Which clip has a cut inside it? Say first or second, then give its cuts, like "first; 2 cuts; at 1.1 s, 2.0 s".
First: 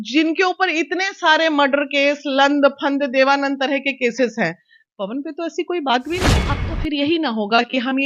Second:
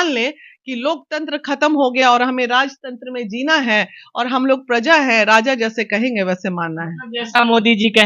first; 1 cut; at 6.4 s